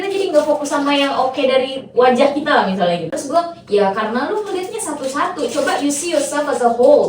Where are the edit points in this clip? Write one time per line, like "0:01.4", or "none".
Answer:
0:03.0